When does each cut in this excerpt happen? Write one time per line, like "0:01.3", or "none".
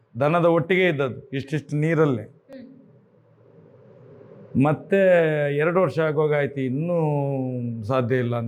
none